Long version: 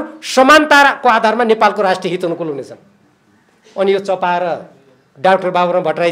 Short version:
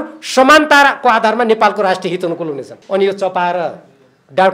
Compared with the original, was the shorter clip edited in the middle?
yes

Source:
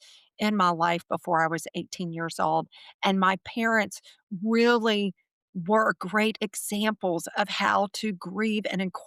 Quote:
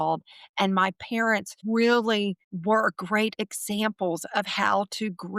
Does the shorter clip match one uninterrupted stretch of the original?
no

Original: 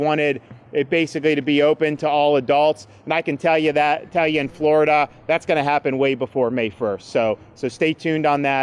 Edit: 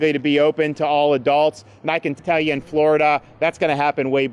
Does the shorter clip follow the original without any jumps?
no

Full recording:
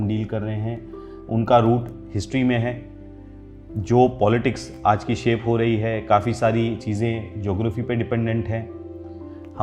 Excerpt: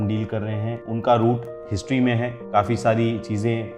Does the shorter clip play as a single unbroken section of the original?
no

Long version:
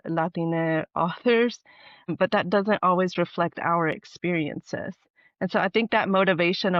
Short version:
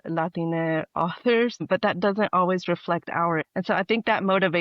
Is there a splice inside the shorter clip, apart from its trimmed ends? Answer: yes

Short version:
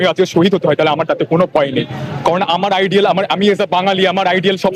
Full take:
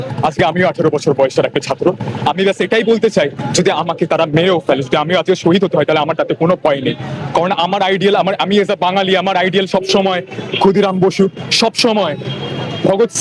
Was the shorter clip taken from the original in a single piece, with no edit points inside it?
yes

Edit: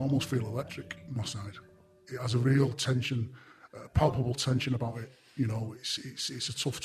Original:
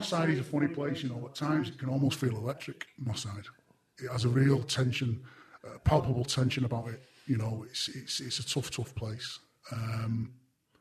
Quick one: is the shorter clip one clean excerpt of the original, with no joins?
yes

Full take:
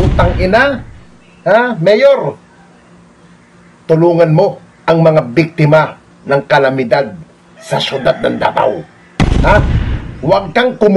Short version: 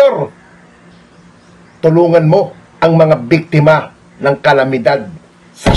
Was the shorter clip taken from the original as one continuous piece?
yes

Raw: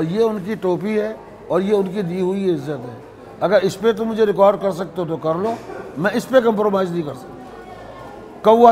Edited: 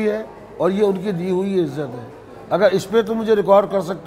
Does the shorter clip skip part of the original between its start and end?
no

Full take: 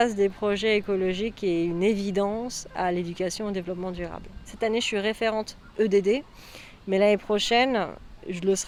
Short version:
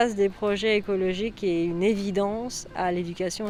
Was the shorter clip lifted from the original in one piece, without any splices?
yes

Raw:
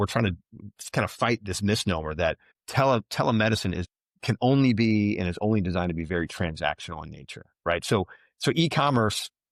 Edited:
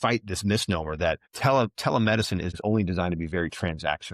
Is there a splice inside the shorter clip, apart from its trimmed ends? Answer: yes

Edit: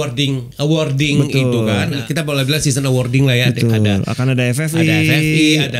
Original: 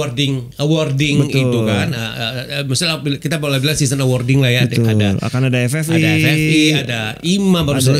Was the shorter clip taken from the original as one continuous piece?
no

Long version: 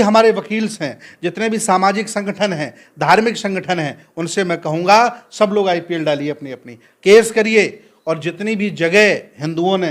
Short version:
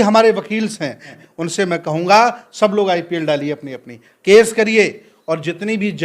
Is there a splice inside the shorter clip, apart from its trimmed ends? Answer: yes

